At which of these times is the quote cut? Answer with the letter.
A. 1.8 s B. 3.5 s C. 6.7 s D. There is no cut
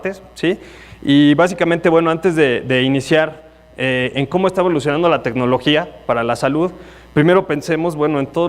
A